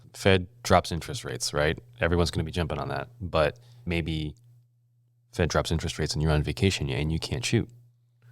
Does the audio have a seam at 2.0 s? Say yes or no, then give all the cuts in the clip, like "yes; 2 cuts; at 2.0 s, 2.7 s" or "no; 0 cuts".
no; 1 cut; at 3.9 s